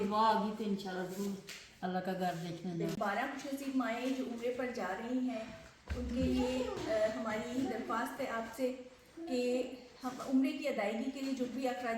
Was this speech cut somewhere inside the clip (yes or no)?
yes